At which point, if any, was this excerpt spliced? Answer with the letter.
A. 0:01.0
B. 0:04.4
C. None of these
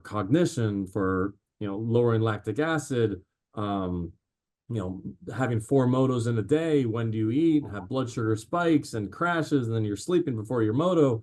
C